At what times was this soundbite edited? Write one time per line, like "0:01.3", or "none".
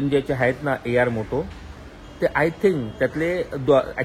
none